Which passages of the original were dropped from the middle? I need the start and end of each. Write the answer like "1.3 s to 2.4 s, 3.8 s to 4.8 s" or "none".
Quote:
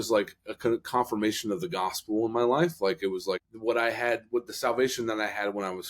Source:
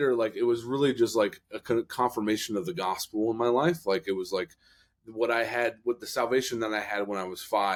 4.5 s to 5.0 s

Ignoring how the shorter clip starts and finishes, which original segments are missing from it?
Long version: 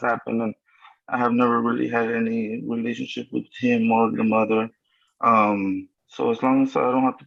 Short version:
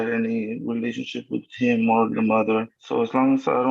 4.8 s to 6.1 s

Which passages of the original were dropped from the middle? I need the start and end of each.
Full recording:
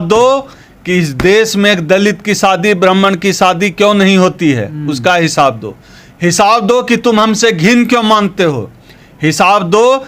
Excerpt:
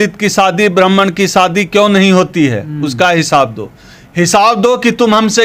none

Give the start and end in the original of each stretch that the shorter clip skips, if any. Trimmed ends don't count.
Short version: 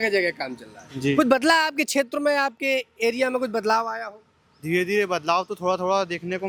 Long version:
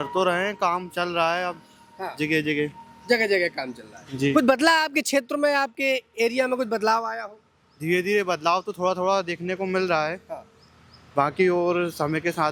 none

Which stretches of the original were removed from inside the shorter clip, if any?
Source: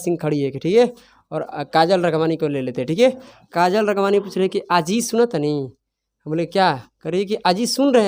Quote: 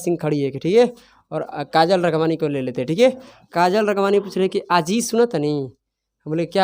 none

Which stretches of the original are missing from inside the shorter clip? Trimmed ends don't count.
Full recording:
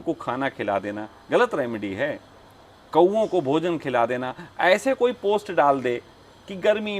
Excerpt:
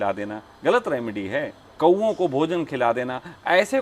2.3 s to 2.7 s

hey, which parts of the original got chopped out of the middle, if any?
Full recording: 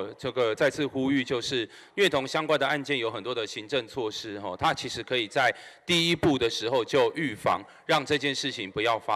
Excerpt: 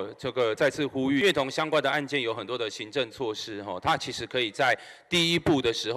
1.2 s to 2.0 s

